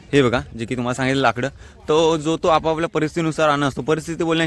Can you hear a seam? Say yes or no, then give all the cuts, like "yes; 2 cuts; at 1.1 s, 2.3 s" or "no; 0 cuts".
no; 0 cuts